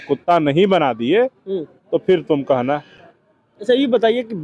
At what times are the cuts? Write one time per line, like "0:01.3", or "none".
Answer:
none